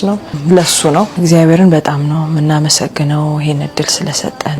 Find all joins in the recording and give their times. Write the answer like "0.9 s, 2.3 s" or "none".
1.1 s